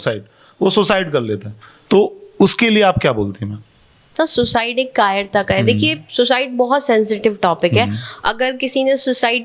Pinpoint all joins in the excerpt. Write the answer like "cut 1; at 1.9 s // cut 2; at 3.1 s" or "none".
cut 1; at 4.1 s